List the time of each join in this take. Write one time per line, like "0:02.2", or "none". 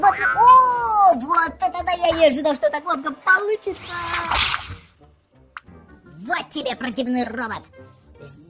0:05.7